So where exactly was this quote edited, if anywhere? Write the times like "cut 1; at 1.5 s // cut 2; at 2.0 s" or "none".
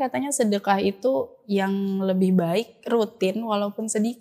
none